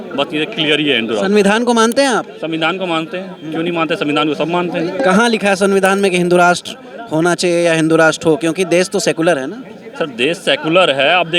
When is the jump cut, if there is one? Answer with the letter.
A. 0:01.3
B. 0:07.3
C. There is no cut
C